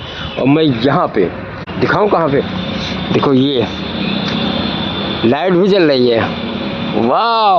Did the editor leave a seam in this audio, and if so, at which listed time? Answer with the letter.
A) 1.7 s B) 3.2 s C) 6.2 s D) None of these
A